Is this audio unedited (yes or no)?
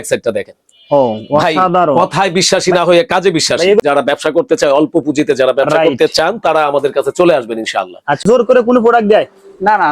no